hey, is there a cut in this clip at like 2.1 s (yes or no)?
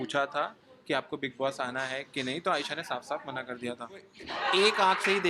no